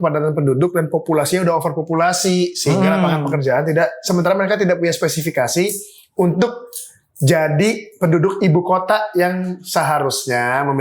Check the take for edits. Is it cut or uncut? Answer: uncut